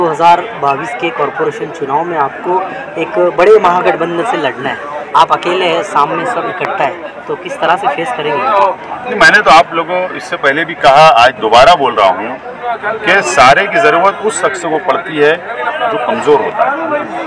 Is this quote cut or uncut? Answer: uncut